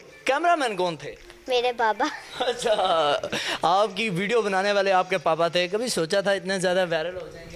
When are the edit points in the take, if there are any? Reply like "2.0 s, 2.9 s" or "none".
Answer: none